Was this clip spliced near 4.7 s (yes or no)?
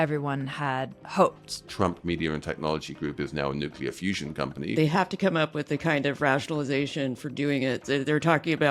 yes